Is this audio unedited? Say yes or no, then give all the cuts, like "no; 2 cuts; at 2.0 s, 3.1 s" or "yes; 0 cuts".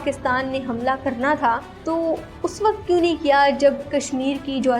no; 1 cut; at 1.7 s